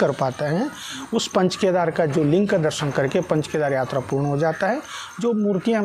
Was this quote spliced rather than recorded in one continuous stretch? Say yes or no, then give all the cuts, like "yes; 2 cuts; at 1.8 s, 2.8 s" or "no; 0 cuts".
no; 0 cuts